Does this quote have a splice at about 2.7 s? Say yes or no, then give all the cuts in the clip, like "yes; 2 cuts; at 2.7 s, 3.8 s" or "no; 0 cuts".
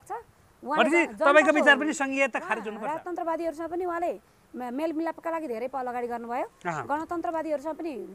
yes; 1 cut; at 2.7 s